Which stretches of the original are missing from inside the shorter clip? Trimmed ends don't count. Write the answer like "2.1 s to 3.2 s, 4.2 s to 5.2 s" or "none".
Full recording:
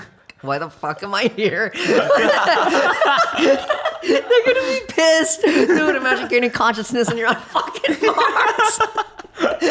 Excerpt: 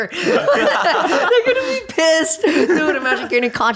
2.9 s to 4.3 s